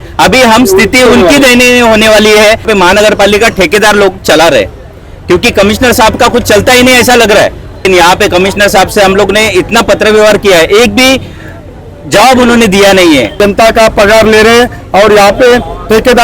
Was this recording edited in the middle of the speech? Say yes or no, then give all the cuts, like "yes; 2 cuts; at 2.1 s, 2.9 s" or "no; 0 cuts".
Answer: yes; 3 cuts; at 2.7 s, 7.8 s, 13.3 s